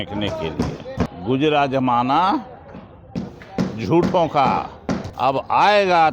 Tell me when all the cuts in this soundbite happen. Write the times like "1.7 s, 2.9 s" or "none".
1.1 s, 5.1 s